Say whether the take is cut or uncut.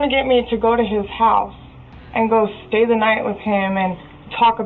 uncut